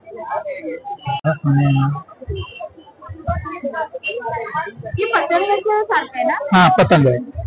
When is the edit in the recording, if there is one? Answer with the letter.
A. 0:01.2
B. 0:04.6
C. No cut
A